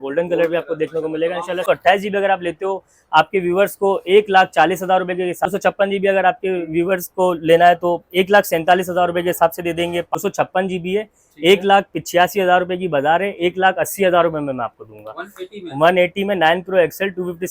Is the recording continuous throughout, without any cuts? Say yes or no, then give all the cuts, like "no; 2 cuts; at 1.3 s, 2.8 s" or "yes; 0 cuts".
no; 3 cuts; at 1.6 s, 5.5 s, 10.2 s